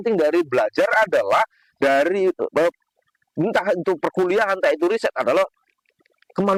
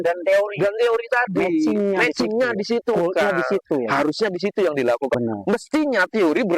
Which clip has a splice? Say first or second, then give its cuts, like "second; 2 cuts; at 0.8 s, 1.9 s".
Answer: second; 1 cut; at 5.1 s